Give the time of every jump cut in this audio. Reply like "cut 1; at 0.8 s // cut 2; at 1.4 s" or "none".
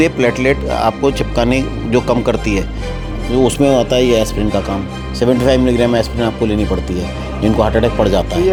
none